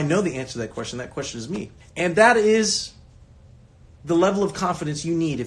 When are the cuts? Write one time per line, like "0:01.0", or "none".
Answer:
0:01.8